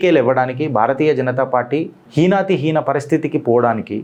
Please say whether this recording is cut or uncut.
uncut